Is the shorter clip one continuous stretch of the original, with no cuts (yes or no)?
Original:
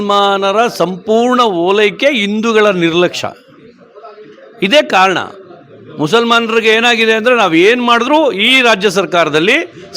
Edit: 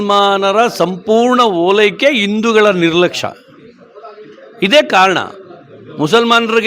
yes